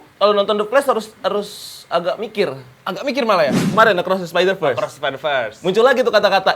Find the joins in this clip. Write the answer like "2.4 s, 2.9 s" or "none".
3.7 s